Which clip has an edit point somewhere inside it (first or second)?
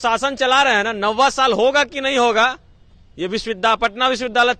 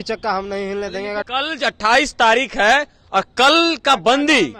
second